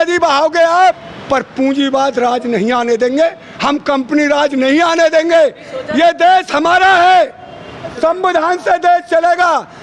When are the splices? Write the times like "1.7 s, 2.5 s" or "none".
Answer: 1.1 s, 7.9 s